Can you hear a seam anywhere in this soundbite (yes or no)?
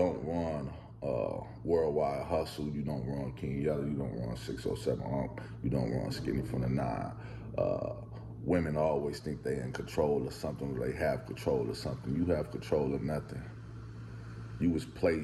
no